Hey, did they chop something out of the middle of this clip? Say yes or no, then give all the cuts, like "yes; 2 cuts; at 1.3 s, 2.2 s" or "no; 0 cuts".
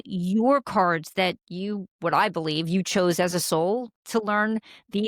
no; 0 cuts